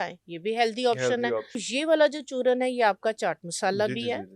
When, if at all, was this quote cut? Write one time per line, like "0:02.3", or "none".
0:01.7